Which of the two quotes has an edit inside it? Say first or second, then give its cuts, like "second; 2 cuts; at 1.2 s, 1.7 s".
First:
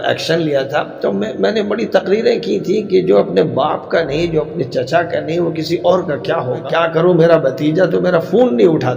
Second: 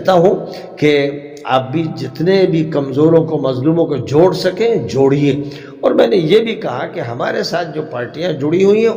first; 1 cut; at 6.7 s